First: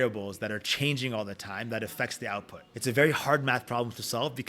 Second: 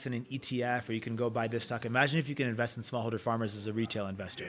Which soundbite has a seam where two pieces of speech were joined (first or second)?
first